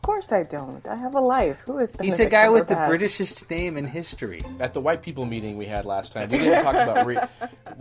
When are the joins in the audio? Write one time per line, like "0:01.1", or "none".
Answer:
0:04.4